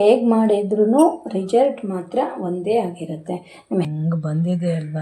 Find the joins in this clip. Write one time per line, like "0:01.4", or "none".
0:03.9